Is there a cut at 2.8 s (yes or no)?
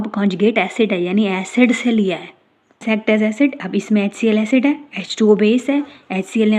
yes